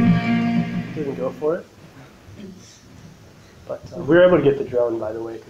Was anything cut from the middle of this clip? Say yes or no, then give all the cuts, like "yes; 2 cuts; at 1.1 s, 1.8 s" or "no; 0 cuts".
no; 0 cuts